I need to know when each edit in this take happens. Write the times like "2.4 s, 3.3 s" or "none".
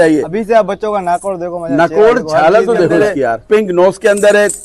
3.4 s